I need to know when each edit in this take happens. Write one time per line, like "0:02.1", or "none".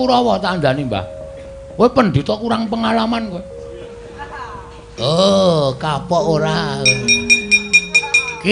0:04.9